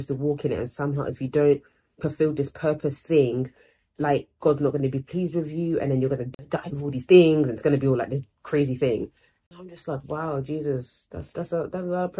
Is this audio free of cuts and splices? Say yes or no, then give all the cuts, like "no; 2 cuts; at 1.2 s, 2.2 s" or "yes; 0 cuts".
no; 2 cuts; at 6.4 s, 9.3 s